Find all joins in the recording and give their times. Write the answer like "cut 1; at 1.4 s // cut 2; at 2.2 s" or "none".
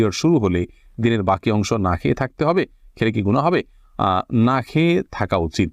none